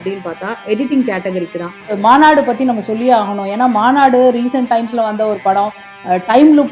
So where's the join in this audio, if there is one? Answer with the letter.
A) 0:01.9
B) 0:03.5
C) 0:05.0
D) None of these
A